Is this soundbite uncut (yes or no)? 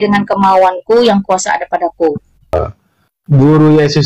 no